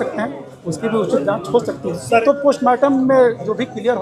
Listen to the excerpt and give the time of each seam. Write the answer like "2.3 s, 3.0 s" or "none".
2.2 s